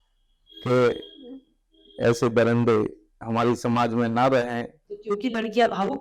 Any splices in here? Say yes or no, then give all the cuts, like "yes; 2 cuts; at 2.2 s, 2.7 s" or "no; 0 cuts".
yes; 1 cut; at 4.9 s